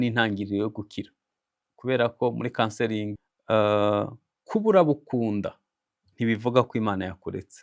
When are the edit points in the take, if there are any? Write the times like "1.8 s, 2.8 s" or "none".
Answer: 3.1 s